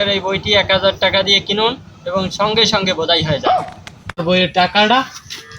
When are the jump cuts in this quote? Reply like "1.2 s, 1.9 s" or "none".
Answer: 4.2 s